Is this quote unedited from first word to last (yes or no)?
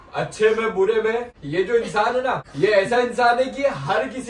no